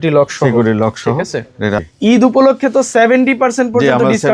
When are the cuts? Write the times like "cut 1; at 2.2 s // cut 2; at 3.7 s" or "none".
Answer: cut 1; at 1.8 s